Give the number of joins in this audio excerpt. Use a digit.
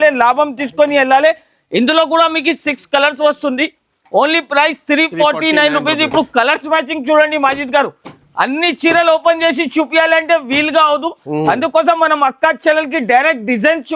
0